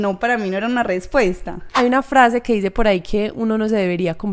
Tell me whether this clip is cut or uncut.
cut